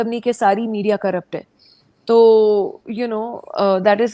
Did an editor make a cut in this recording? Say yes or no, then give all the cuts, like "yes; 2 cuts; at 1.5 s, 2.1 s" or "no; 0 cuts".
no; 0 cuts